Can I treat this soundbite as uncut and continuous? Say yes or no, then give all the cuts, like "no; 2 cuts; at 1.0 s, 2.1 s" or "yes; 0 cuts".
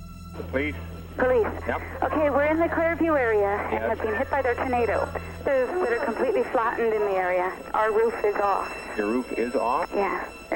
no; 1 cut; at 5.5 s